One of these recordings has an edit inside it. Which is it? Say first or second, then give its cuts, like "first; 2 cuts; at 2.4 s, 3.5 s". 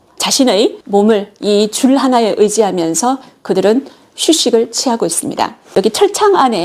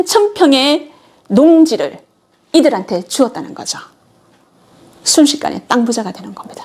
first; 1 cut; at 5.6 s